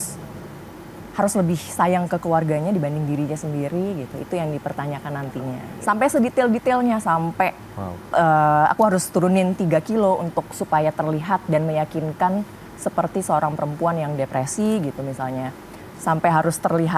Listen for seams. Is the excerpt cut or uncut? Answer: cut